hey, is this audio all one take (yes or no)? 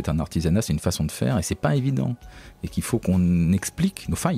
yes